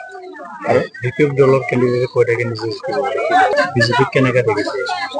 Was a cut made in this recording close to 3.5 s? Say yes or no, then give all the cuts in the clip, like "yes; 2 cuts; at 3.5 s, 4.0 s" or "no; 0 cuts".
yes; 1 cut; at 3.5 s